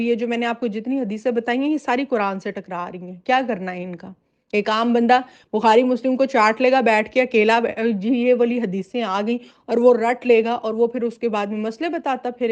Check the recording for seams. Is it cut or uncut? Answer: uncut